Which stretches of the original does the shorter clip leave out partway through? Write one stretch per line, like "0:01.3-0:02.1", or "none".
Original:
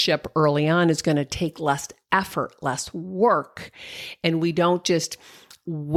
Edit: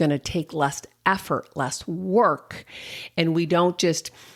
none